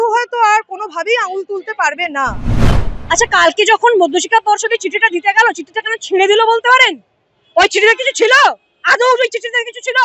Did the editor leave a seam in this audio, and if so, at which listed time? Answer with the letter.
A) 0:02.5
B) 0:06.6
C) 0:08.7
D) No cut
A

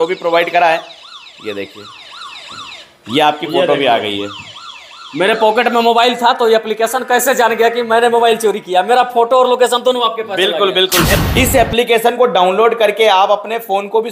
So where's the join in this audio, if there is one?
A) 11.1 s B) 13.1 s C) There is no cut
A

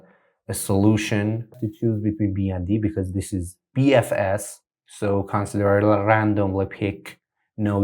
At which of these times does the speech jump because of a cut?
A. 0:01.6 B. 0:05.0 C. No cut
A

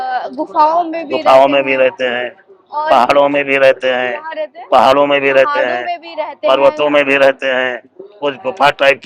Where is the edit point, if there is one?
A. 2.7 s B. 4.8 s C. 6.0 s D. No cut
D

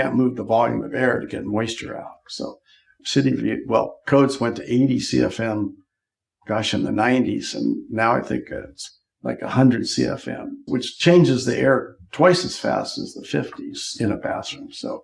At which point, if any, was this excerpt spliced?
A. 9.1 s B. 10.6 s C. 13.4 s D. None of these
B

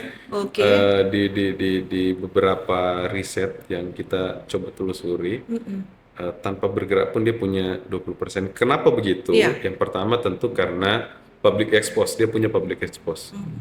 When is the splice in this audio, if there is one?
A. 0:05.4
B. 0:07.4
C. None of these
C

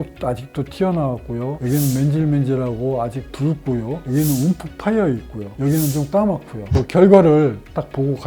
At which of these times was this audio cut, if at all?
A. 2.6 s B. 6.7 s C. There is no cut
B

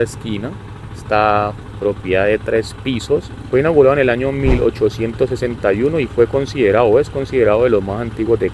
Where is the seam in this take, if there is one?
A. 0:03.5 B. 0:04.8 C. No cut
C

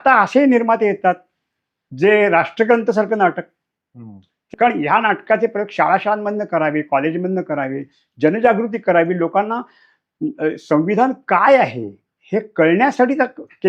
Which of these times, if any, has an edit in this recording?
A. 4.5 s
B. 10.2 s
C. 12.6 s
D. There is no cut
A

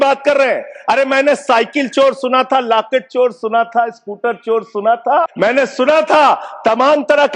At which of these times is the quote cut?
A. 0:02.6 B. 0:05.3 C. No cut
B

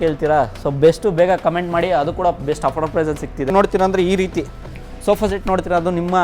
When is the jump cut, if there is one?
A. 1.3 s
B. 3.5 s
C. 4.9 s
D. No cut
B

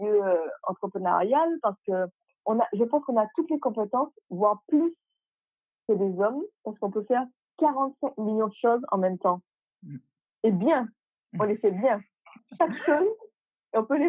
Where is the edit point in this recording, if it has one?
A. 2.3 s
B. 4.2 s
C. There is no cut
A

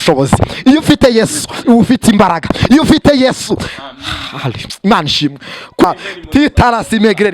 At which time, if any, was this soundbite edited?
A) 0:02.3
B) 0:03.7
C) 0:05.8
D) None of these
C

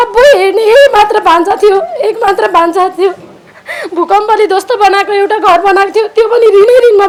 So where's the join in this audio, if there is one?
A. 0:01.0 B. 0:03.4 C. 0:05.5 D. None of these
D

